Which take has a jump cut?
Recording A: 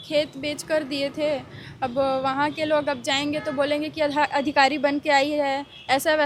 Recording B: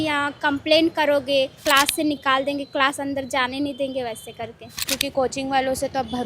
B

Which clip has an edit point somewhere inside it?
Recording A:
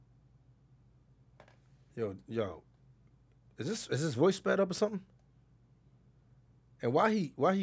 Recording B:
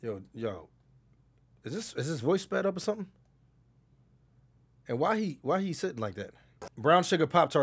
B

